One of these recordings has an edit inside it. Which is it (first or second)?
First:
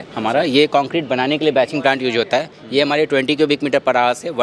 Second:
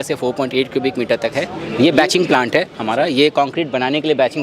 second